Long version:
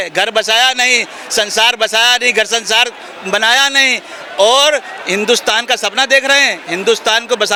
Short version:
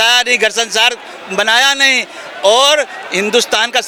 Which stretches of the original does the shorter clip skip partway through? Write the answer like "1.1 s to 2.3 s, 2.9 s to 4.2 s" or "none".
none